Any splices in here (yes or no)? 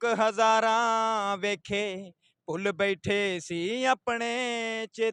no